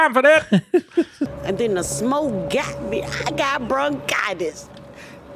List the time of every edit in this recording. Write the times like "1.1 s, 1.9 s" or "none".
1.4 s